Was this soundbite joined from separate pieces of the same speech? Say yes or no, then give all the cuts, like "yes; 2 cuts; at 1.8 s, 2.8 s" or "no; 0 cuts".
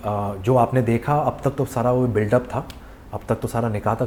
no; 0 cuts